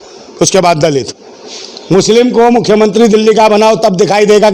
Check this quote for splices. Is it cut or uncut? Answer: uncut